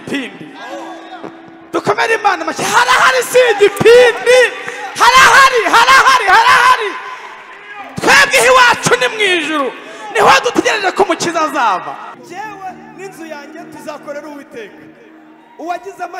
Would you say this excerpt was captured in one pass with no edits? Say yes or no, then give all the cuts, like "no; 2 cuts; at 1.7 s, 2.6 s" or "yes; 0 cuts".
no; 1 cut; at 12.1 s